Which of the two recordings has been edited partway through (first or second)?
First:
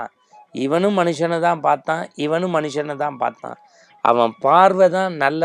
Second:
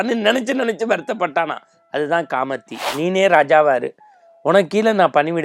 second